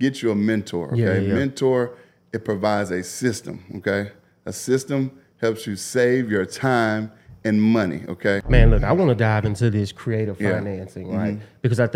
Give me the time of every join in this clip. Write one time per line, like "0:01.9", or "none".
0:08.4